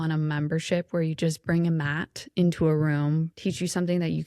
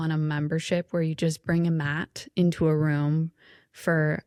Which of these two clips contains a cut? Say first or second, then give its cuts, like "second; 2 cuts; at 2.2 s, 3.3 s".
first; 1 cut; at 3.3 s